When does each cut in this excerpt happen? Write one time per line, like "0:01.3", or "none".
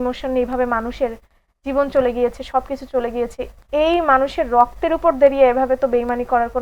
none